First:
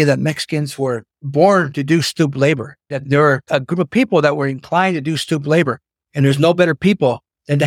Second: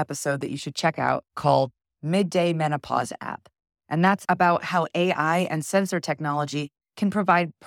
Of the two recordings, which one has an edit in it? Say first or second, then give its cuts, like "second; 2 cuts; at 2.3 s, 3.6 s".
first; 2 cuts; at 1.1 s, 3.0 s